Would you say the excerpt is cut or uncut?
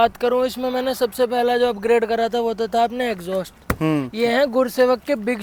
uncut